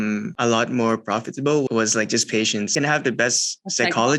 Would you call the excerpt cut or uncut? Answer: cut